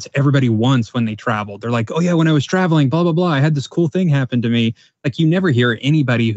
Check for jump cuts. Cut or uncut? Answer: uncut